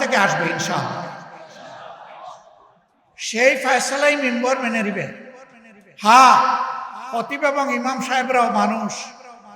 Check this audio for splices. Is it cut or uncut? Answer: uncut